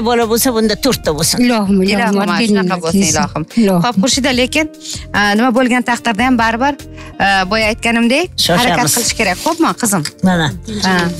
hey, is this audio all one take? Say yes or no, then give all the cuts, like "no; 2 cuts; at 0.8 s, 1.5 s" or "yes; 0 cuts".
yes; 0 cuts